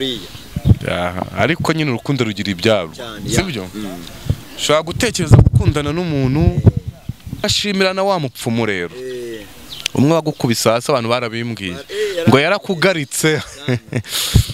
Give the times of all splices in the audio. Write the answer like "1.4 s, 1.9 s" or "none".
7.4 s